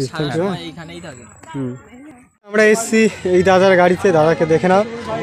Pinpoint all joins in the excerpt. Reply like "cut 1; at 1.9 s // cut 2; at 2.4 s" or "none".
cut 1; at 2.6 s

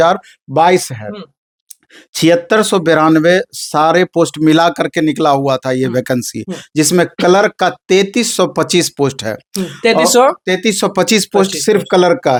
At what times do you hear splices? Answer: none

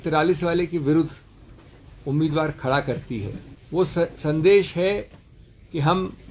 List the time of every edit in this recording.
cut 1; at 3.8 s

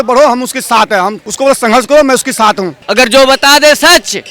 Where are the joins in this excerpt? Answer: cut 1; at 1.2 s // cut 2; at 2.7 s

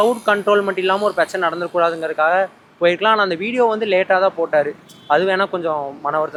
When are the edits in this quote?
none

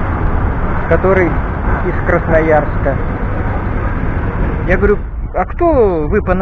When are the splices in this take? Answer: cut 1; at 4.6 s

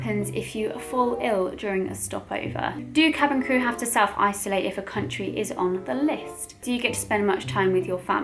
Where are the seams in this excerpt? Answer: cut 1; at 3.0 s // cut 2; at 6.6 s

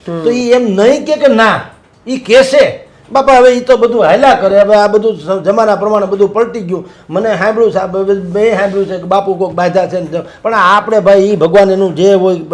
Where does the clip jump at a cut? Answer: none

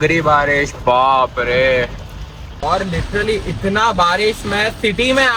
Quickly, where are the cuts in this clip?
cut 1; at 2.6 s

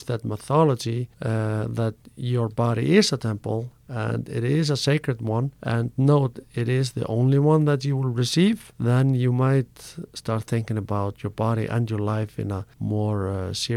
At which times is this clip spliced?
cut 1; at 1.1 s // cut 2; at 5.6 s // cut 3; at 8.7 s // cut 4; at 12.7 s

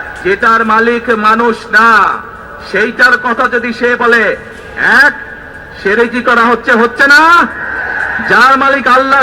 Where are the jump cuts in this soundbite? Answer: none

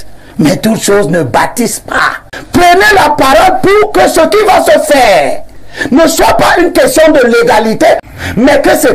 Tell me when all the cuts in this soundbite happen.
cut 1; at 2.3 s // cut 2; at 8.1 s

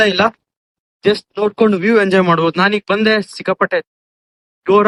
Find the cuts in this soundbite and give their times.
none

